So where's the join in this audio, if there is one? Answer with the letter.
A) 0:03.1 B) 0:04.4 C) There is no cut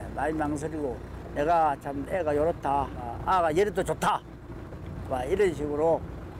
A